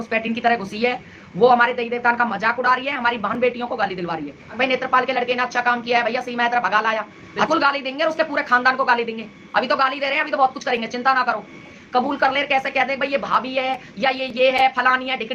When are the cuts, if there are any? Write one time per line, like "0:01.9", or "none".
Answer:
0:04.4
0:07.5
0:11.8